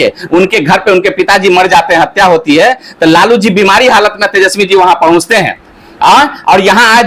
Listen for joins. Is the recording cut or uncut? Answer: uncut